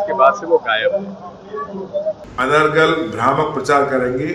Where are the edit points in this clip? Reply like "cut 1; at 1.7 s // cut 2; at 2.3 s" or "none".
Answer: cut 1; at 2.2 s